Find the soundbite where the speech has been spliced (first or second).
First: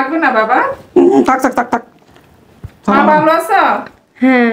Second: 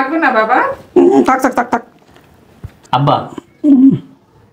second